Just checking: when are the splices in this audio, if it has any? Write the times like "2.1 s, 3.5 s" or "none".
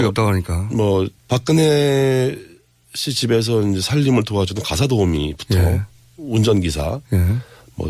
1.8 s